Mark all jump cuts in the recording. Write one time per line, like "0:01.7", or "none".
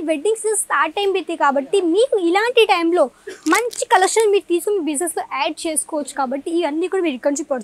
none